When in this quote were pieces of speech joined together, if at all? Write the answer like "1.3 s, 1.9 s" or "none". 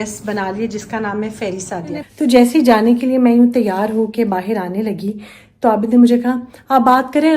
2.0 s